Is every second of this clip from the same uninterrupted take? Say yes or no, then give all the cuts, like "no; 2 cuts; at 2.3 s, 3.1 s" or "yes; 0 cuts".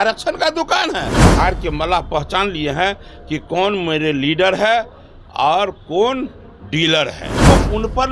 no; 2 cuts; at 1.3 s, 7.3 s